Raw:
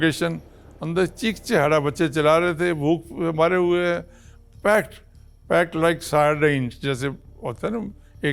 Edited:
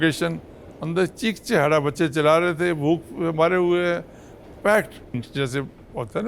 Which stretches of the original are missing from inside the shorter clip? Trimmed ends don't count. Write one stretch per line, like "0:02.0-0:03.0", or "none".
0:05.2-0:06.7